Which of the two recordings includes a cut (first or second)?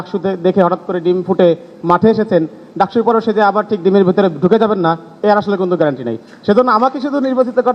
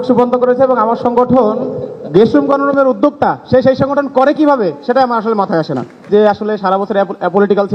second